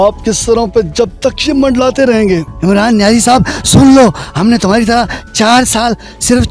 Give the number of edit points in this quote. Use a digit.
1